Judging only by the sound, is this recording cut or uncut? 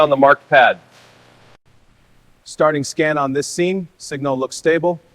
cut